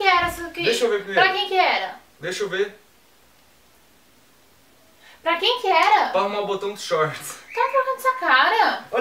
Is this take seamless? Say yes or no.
no